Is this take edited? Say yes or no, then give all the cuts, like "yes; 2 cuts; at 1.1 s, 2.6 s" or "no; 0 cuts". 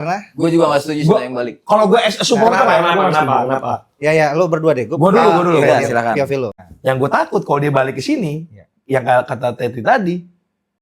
yes; 1 cut; at 6.5 s